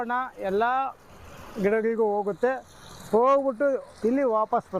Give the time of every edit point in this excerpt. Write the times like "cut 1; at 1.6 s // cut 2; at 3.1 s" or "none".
cut 1; at 3.9 s